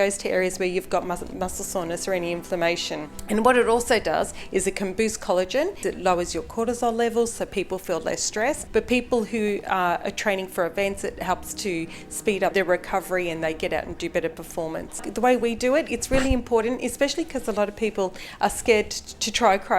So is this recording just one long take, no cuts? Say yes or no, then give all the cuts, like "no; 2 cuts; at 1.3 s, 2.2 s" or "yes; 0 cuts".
no; 5 cuts; at 3.1 s, 5.8 s, 8.6 s, 12.5 s, 15.0 s